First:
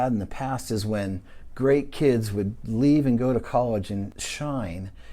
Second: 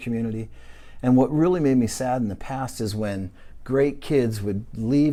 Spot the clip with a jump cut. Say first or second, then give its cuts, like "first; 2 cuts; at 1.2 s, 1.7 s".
first; 1 cut; at 4.1 s